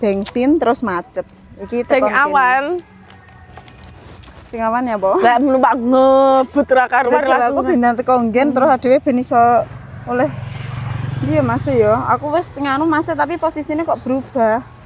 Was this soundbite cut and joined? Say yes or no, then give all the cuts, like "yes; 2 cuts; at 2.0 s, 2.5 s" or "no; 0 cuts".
no; 0 cuts